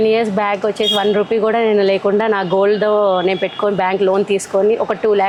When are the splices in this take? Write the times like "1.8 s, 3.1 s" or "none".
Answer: none